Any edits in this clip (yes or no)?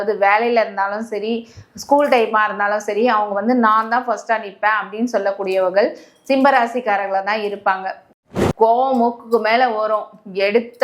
yes